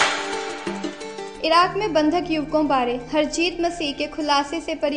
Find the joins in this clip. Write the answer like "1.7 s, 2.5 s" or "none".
none